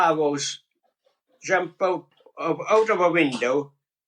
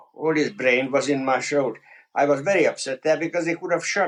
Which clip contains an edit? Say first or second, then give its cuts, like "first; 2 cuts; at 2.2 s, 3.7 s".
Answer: first; 1 cut; at 2.2 s